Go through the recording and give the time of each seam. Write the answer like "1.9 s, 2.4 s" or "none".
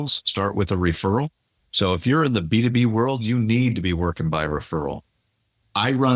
none